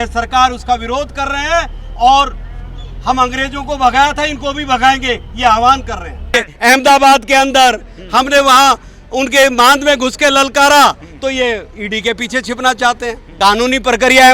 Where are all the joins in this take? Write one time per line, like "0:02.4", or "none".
0:06.3
0:13.3